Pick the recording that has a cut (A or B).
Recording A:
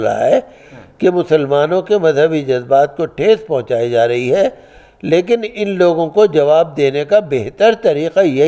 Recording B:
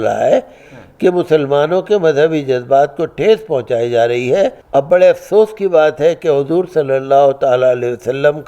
B